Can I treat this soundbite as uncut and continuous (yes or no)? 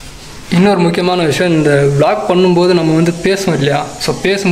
yes